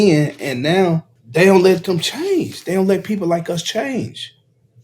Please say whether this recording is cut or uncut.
cut